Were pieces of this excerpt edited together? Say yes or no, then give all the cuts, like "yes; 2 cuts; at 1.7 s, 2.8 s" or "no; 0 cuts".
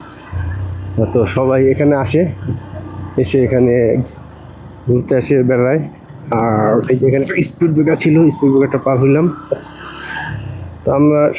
no; 0 cuts